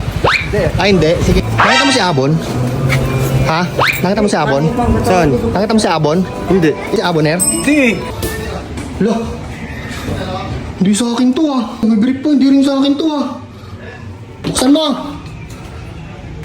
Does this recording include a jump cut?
yes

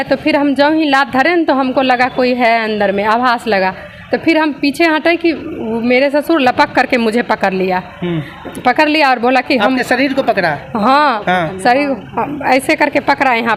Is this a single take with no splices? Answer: yes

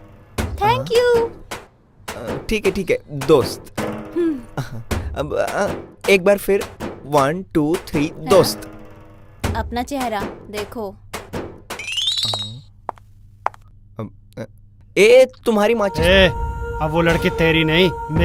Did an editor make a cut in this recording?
yes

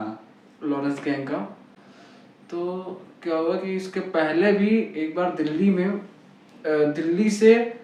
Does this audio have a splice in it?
no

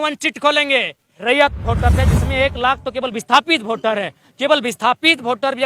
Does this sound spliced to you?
yes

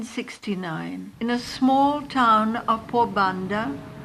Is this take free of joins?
yes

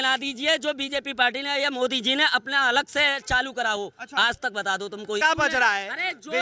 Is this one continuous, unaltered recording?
no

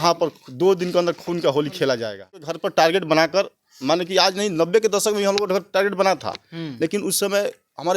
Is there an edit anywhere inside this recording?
yes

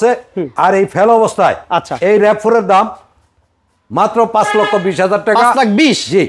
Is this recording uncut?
yes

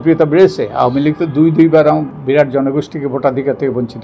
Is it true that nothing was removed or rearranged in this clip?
no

